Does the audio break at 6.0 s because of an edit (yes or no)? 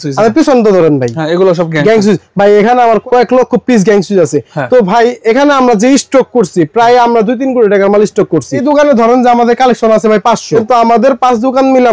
no